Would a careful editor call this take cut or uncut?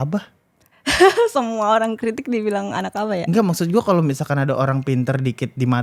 uncut